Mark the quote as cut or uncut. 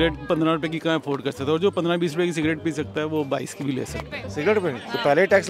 cut